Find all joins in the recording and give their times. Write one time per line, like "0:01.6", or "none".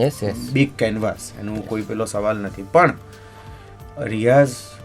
none